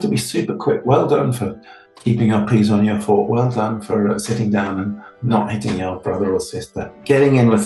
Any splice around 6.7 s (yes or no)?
no